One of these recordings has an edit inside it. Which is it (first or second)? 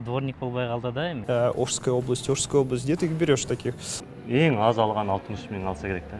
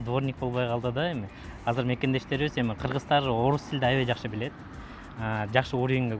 first